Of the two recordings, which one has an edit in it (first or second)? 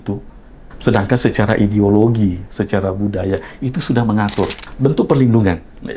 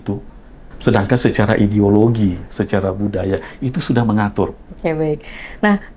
first